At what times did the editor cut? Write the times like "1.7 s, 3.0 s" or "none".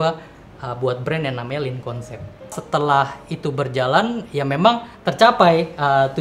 2.5 s